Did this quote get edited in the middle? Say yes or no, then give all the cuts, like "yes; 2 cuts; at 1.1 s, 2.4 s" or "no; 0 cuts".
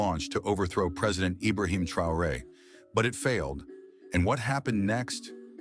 no; 0 cuts